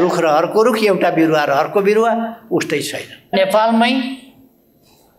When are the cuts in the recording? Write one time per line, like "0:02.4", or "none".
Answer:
0:03.3